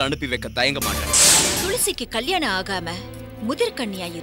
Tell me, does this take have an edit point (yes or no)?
yes